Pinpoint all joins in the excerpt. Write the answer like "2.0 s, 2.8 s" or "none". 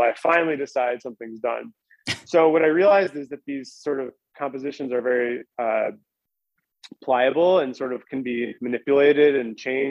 none